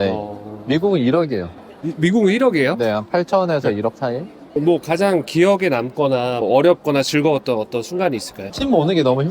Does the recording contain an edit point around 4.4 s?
yes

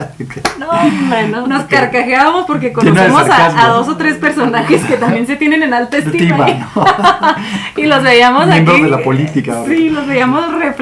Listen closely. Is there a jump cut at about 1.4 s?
yes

